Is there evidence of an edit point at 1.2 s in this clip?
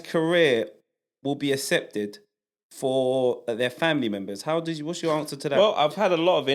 no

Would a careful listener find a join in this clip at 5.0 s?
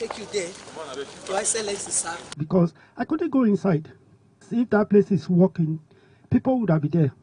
no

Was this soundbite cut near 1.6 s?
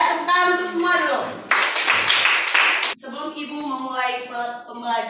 no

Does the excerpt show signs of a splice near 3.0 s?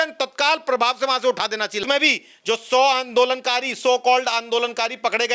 no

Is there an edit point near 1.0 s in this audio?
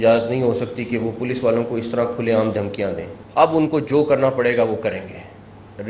no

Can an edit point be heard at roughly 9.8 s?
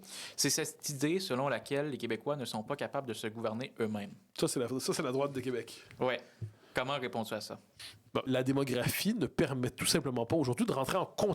no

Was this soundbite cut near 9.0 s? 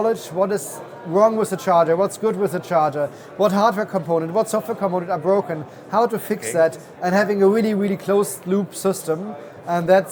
no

